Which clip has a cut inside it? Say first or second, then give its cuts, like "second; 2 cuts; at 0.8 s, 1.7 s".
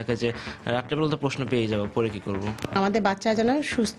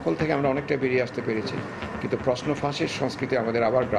first; 1 cut; at 2.7 s